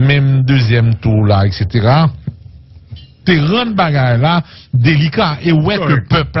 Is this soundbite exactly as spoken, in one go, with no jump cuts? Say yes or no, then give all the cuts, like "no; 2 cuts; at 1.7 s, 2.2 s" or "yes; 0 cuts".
yes; 0 cuts